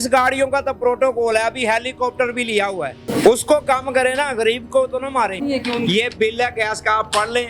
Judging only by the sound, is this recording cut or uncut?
cut